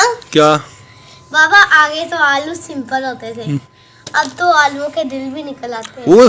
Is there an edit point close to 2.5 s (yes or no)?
no